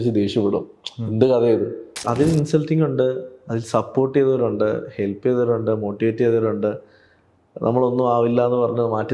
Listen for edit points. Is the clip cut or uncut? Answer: cut